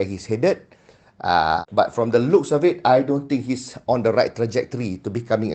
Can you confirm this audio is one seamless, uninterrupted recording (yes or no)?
no